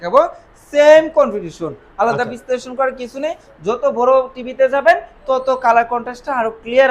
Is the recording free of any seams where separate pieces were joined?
yes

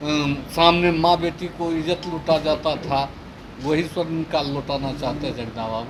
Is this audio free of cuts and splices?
yes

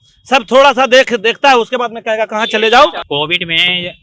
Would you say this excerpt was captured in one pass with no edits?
no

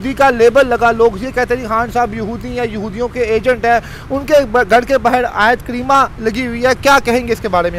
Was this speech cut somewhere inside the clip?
no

